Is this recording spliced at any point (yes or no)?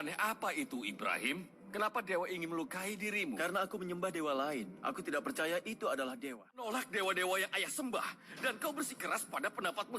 yes